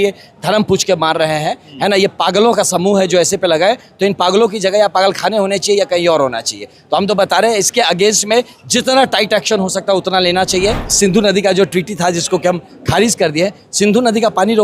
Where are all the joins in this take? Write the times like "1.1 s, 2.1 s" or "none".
10.8 s